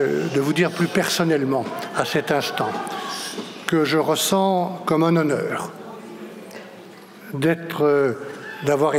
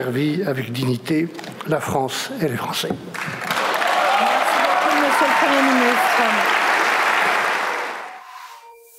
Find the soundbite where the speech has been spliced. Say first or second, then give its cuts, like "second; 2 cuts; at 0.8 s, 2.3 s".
second; 1 cut; at 8.0 s